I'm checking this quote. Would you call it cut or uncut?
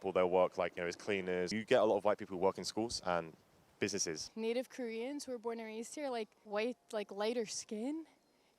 cut